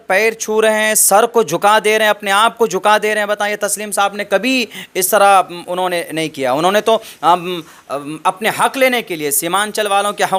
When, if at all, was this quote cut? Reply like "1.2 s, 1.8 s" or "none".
none